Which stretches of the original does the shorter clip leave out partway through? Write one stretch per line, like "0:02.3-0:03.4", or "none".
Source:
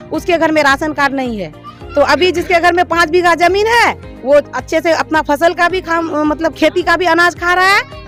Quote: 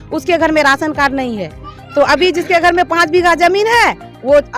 none